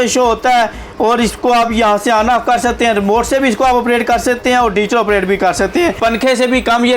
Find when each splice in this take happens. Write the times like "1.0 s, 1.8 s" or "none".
6.0 s